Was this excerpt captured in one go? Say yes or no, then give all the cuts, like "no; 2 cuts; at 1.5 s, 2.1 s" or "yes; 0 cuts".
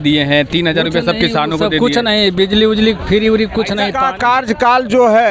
no; 1 cut; at 3.9 s